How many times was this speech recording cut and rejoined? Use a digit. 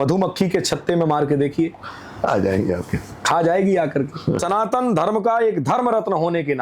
1